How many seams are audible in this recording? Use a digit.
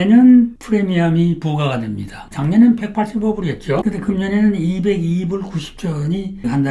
1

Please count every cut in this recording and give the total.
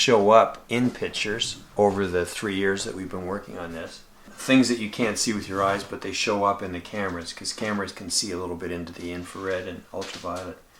1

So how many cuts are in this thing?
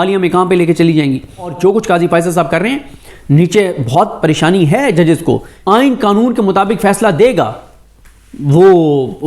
2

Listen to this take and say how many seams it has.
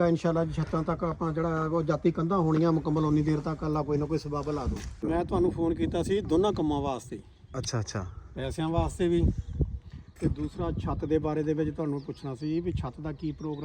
1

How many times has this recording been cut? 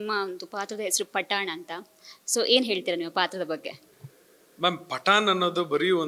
0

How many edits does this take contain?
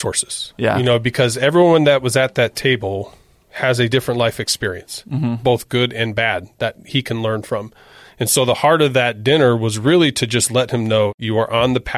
2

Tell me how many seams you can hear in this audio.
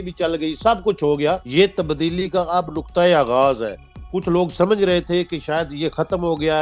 1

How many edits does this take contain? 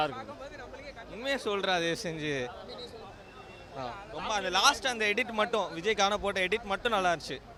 0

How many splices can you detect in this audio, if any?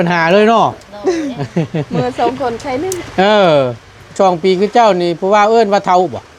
1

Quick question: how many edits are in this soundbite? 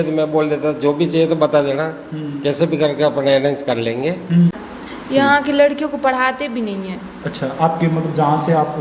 1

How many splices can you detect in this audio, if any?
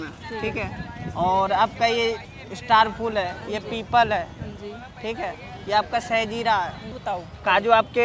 1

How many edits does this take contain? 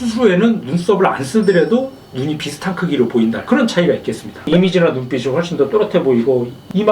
1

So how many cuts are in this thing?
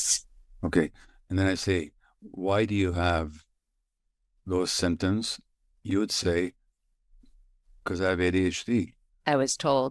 0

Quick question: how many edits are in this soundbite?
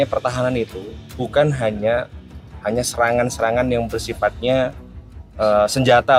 0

